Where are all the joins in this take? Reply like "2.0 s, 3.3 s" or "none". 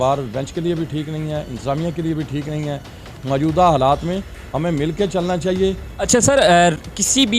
5.9 s

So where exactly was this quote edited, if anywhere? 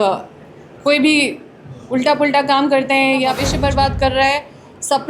3.5 s

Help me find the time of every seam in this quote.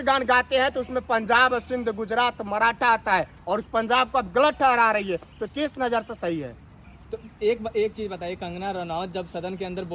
none

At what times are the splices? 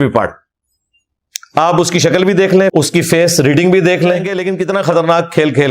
4.4 s

